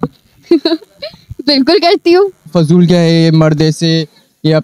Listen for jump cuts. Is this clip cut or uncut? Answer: cut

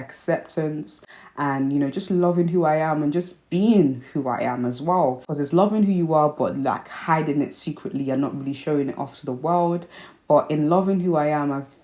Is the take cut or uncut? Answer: uncut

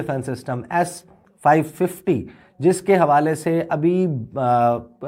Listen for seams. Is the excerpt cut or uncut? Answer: uncut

